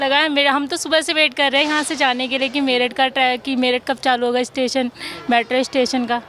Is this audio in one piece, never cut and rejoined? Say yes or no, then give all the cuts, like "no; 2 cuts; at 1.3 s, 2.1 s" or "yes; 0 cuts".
yes; 0 cuts